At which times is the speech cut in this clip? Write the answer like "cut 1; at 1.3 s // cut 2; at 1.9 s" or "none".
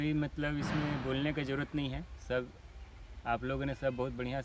none